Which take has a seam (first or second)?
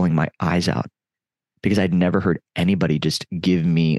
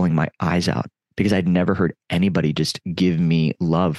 second